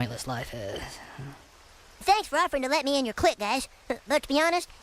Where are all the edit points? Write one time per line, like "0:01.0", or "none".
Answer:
0:02.0